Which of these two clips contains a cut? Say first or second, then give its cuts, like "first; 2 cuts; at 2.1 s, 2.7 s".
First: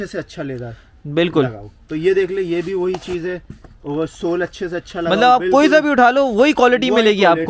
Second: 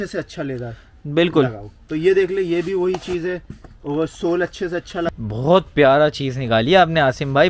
second; 1 cut; at 5.1 s